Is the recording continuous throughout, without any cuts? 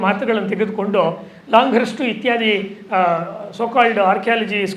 yes; 0 cuts

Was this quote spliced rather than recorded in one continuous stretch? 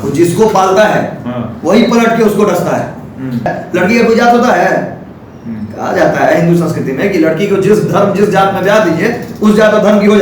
yes; 1 cut; at 3.5 s

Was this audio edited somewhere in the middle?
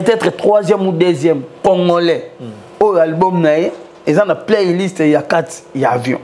no; 0 cuts

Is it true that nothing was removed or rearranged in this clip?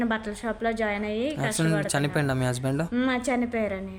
yes; 0 cuts

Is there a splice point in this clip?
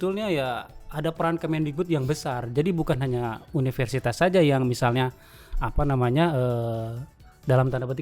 no; 0 cuts

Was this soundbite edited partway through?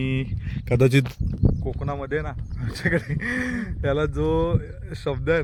no; 0 cuts

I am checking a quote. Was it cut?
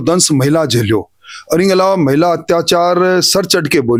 no; 0 cuts

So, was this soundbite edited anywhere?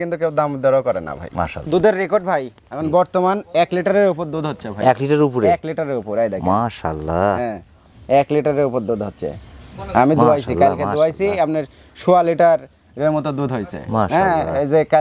yes; 1 cut; at 1.6 s

